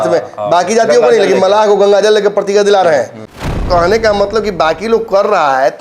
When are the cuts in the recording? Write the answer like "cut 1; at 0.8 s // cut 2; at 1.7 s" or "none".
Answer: cut 1; at 3.5 s